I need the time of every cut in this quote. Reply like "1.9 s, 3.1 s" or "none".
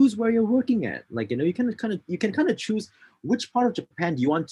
none